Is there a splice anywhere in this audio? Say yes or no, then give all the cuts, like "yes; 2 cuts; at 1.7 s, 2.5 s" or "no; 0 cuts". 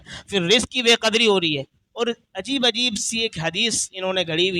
yes; 1 cut; at 1.8 s